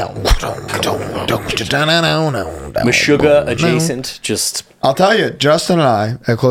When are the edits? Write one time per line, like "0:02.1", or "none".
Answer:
none